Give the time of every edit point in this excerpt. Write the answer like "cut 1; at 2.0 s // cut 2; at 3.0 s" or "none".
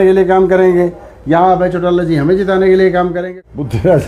cut 1; at 3.2 s